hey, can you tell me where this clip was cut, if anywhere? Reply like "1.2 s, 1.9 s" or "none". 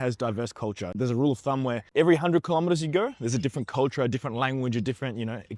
none